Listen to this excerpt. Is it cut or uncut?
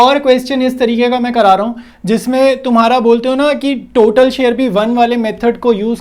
uncut